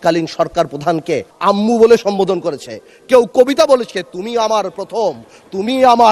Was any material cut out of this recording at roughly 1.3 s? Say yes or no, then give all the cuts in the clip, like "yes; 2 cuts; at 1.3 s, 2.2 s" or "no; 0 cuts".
yes; 1 cut; at 1.3 s